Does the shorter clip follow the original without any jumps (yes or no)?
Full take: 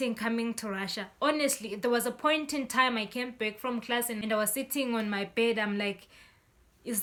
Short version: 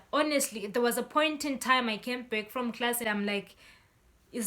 no